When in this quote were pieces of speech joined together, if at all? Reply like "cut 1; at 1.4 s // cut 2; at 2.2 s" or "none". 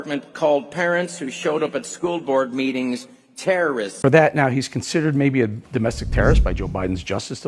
cut 1; at 4.0 s